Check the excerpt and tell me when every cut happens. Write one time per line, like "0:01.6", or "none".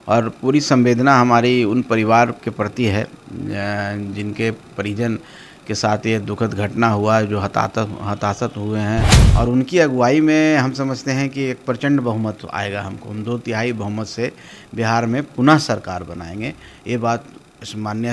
0:09.2